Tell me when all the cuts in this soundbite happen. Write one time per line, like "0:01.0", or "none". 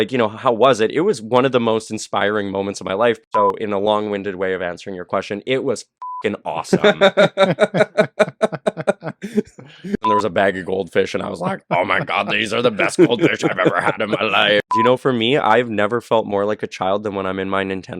0:03.2
0:10.0
0:14.7